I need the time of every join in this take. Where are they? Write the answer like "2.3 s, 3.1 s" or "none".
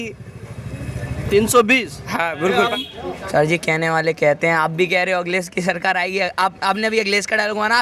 2.7 s

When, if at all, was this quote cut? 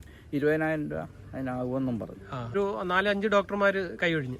2.5 s

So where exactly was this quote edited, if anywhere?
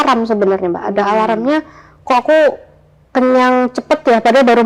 none

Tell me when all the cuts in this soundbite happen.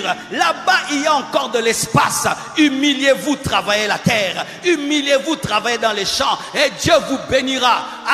none

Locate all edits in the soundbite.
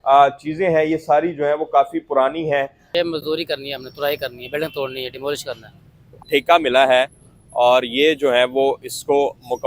2.8 s, 6.2 s

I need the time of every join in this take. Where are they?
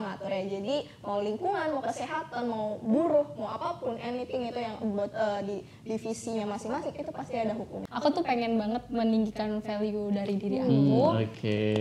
7.8 s

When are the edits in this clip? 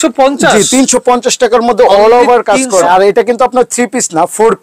2.8 s

